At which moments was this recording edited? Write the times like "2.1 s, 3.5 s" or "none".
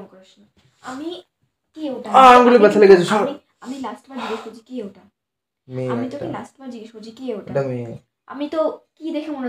none